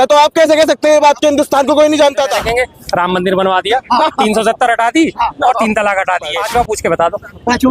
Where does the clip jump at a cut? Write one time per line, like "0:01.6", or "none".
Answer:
0:02.4
0:06.4